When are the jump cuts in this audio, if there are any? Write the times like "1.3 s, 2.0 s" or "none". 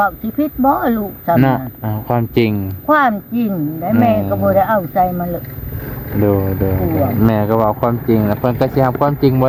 none